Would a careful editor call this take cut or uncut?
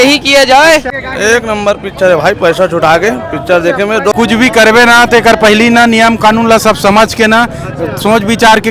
cut